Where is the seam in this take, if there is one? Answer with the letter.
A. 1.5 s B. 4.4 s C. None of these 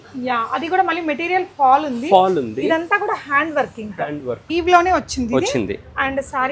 B